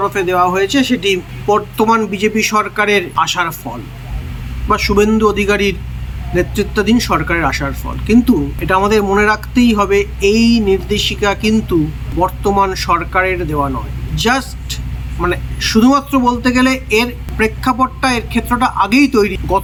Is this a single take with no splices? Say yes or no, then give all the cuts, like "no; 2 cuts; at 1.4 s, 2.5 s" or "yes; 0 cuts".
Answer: yes; 0 cuts